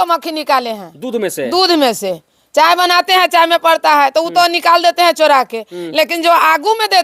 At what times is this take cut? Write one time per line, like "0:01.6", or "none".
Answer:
none